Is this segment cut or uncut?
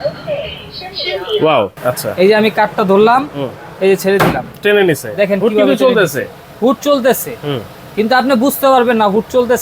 cut